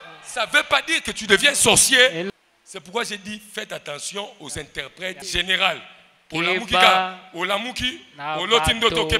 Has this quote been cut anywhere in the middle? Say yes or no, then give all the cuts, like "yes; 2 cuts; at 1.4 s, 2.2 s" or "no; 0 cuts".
yes; 2 cuts; at 2.3 s, 5.2 s